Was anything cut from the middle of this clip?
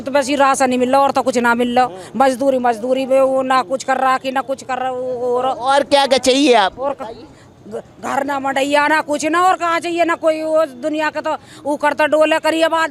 no; 0 cuts

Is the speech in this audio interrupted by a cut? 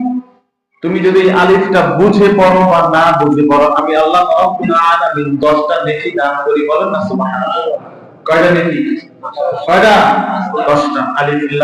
no; 0 cuts

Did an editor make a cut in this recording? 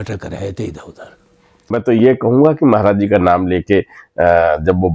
yes; 1 cut; at 1.7 s

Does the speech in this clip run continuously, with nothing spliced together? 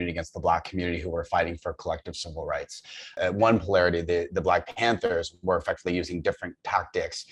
yes; 0 cuts

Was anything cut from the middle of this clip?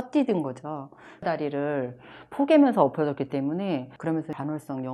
no; 0 cuts

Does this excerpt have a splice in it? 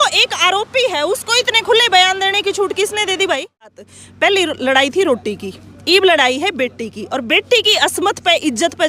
yes; 1 cut; at 3.8 s

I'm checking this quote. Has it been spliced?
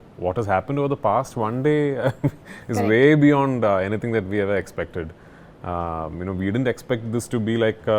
no; 0 cuts

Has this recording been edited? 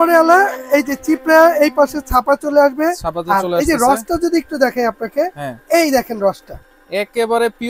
no; 0 cuts

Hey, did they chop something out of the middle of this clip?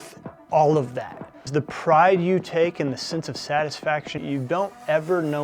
yes; 2 cuts; at 1.5 s, 4.2 s

